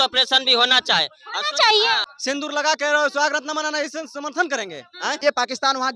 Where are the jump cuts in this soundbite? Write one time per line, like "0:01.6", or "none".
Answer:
0:02.1
0:05.2